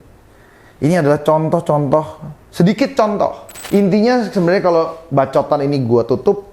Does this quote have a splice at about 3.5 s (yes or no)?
yes